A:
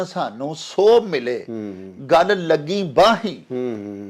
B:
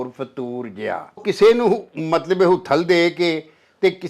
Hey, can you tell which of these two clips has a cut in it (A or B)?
B